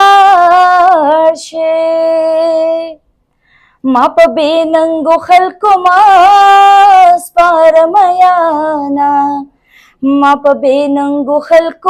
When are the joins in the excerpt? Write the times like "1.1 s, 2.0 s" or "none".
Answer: none